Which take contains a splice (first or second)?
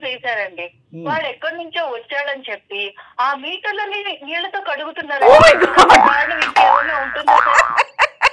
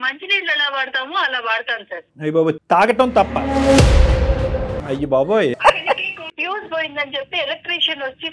second